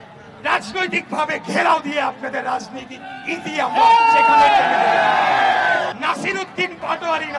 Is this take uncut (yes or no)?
no